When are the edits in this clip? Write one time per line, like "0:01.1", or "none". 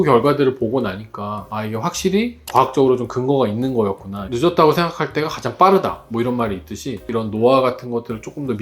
0:04.3
0:07.1